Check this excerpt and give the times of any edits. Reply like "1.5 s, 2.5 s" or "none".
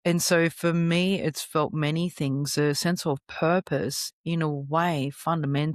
none